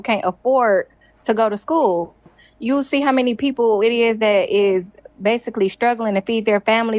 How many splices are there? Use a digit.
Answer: 0